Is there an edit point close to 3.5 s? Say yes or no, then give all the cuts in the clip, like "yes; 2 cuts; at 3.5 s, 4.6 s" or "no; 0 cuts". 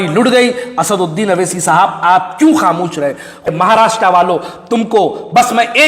yes; 1 cut; at 3.5 s